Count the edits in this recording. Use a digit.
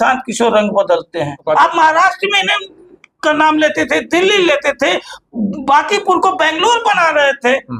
1